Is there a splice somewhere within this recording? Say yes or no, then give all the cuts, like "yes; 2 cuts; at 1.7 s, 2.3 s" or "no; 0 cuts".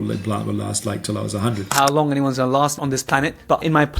yes; 1 cut; at 1.7 s